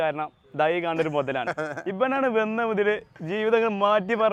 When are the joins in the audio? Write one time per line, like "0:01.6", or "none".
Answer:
none